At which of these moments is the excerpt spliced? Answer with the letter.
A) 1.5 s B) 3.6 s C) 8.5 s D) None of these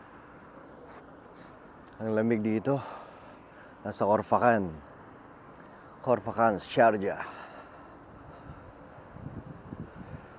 D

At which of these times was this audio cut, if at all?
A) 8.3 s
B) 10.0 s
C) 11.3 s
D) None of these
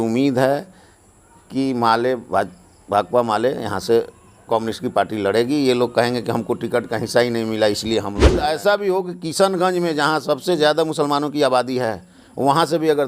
A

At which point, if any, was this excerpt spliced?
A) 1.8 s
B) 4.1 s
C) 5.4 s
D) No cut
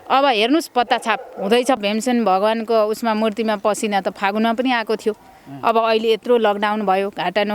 A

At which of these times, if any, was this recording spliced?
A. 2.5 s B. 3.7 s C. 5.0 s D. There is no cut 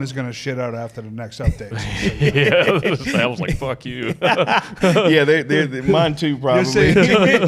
D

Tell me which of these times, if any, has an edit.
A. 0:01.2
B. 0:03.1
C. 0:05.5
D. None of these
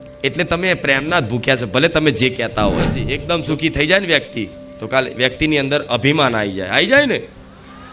B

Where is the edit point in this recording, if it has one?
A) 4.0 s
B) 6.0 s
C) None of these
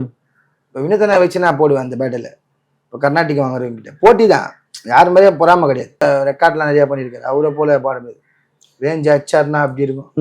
B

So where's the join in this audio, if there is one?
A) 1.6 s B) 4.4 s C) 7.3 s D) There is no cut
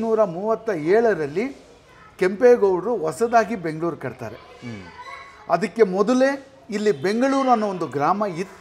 D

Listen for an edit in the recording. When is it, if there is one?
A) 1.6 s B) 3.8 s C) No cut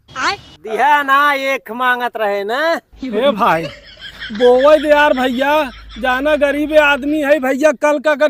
C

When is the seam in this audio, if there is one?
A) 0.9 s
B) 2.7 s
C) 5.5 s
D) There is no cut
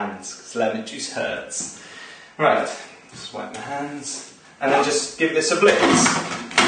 C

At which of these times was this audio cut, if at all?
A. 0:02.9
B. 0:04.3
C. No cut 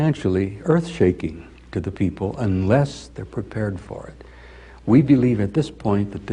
C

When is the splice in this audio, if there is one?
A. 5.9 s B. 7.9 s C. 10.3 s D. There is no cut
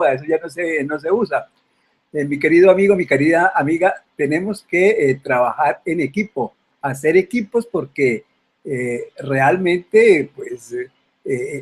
B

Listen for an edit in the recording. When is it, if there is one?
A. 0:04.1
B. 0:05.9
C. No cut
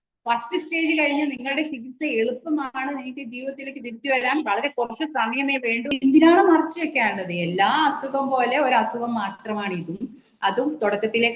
B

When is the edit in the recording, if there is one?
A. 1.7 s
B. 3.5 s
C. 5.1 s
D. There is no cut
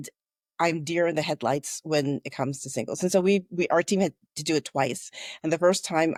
D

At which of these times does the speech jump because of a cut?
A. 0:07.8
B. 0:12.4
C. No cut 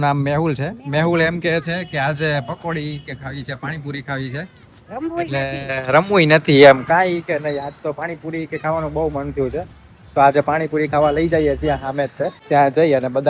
C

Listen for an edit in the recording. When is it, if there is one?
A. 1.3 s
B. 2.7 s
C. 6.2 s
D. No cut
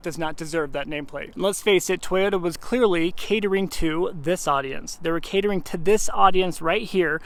D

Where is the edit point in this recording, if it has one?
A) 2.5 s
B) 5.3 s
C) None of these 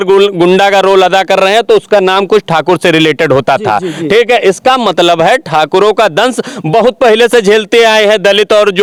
C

